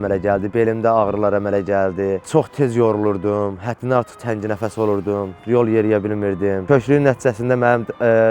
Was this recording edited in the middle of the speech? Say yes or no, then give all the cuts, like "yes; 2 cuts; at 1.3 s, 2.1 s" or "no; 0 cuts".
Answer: yes; 1 cut; at 2.2 s